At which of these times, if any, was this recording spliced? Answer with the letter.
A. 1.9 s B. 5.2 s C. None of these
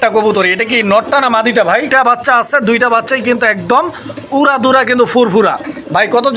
A